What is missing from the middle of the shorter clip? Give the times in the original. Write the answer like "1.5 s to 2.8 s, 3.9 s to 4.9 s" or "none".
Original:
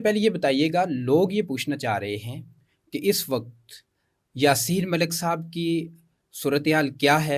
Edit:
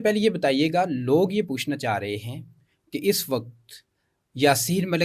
none